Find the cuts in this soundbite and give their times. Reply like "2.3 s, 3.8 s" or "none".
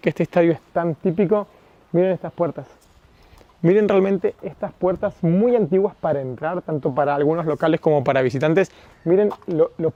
none